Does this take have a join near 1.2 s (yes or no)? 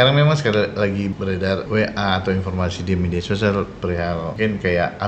yes